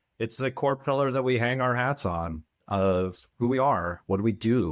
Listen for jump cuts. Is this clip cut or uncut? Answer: cut